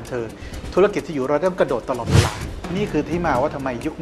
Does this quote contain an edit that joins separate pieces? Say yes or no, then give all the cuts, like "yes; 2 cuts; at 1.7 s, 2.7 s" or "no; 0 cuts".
yes; 1 cut; at 2.5 s